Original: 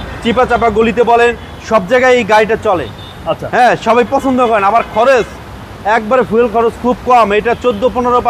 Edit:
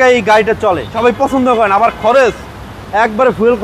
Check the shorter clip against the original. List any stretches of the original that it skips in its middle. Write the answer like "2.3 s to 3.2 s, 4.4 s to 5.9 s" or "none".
2.9 s to 3.8 s